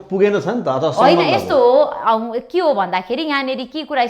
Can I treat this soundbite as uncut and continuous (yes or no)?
yes